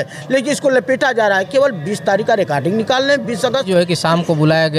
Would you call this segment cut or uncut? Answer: cut